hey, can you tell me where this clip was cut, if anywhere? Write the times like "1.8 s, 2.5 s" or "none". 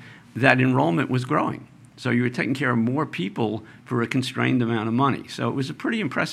none